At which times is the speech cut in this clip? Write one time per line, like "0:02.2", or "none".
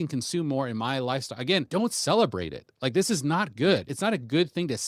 0:01.7
0:03.9